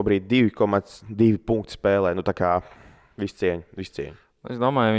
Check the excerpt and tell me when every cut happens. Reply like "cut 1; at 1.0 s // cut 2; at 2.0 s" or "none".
none